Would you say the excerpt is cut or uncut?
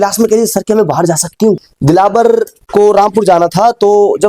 cut